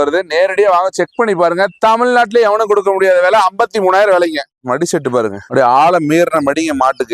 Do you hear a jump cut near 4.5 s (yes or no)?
yes